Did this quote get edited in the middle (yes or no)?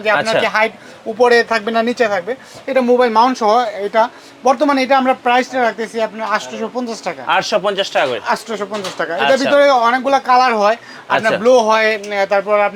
no